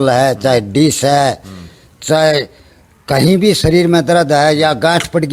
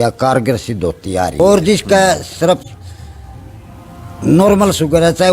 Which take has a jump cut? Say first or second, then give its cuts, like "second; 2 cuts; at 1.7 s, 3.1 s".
second; 1 cut; at 1.4 s